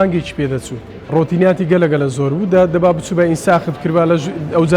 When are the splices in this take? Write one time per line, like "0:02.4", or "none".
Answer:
0:01.1